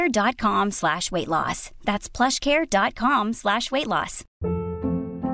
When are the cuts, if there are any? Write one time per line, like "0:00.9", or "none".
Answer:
0:04.2